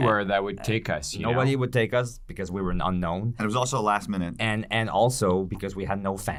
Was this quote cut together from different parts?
no; 0 cuts

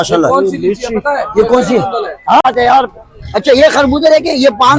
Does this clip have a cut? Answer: yes; 1 cut; at 2.4 s

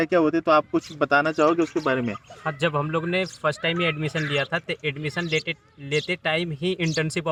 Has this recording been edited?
no; 0 cuts

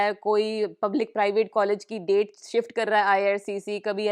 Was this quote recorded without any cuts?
yes; 0 cuts

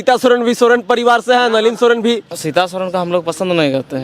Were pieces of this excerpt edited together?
yes; 1 cut; at 2.3 s

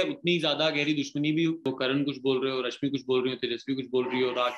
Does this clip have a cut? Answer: yes; 1 cut; at 1.6 s

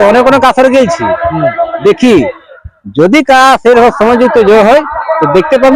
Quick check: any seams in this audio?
no; 0 cuts

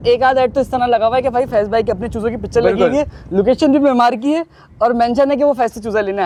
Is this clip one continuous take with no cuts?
yes; 0 cuts

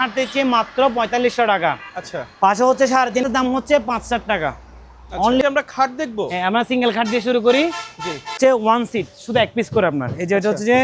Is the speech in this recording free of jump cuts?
no; 3 cuts; at 3.3 s, 5.4 s, 8.4 s

